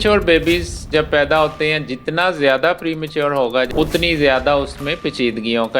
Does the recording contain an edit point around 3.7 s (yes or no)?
yes